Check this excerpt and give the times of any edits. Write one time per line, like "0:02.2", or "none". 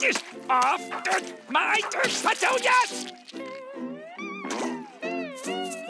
none